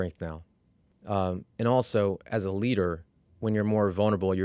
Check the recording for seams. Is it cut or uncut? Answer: uncut